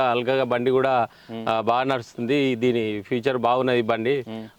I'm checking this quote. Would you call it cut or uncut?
uncut